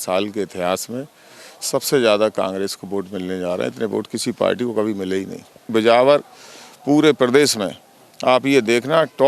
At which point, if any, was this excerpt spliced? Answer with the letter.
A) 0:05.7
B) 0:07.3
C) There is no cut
A